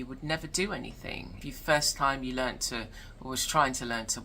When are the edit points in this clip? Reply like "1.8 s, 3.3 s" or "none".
1.4 s